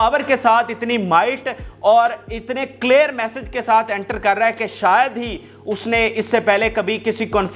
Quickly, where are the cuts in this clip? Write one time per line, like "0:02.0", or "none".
none